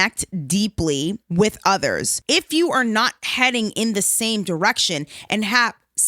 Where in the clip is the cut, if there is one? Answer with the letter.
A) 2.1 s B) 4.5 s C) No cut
A